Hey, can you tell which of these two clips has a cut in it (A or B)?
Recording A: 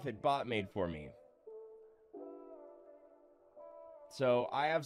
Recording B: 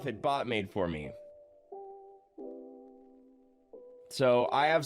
B